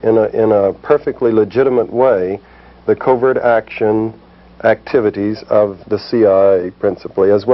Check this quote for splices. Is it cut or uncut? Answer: uncut